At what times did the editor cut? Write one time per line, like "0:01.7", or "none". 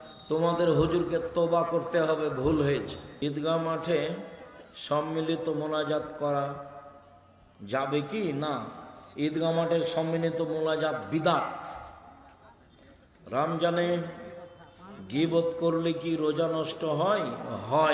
0:03.1